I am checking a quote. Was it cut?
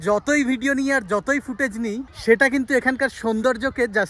no; 0 cuts

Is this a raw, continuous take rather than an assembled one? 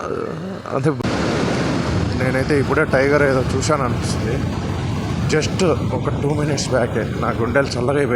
no; 1 cut; at 1.0 s

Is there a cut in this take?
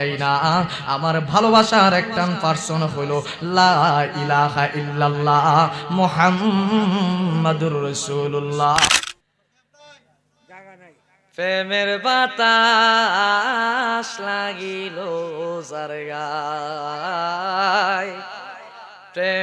yes; 1 cut; at 8.9 s

